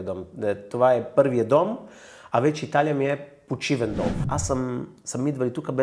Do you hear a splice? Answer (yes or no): yes